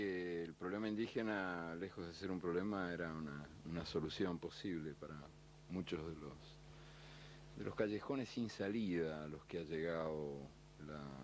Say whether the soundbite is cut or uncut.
uncut